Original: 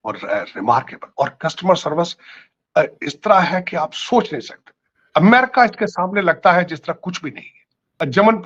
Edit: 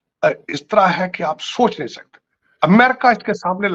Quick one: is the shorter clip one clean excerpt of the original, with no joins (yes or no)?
yes